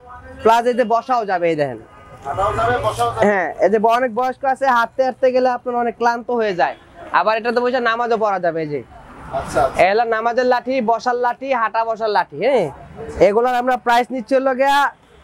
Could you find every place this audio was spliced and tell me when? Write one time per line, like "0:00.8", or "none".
none